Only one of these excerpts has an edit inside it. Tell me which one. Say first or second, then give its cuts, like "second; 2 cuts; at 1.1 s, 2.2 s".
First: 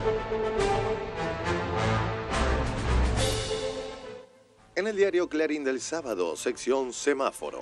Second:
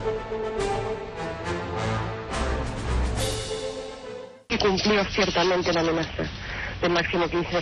second; 1 cut; at 4.5 s